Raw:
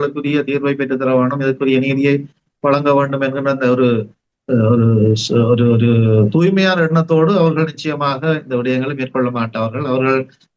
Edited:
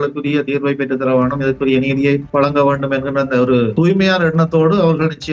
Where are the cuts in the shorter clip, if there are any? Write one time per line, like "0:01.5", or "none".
0:02.3
0:03.7